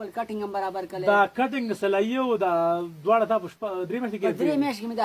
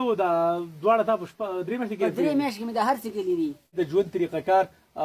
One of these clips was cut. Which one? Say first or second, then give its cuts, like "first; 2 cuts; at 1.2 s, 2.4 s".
second; 1 cut; at 3.7 s